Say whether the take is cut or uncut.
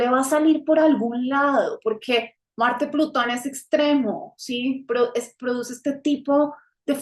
uncut